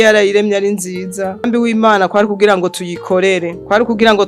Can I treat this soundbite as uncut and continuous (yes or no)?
no